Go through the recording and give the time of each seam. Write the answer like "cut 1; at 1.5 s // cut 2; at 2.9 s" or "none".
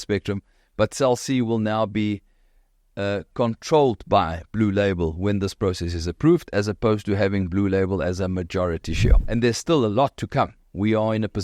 cut 1; at 9.2 s